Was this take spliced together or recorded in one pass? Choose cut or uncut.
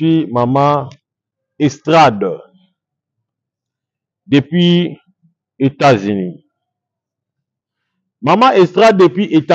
uncut